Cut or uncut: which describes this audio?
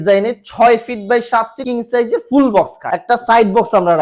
cut